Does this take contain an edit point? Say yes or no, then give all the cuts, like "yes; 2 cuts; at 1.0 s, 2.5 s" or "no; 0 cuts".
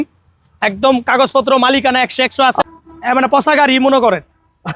yes; 1 cut; at 2.7 s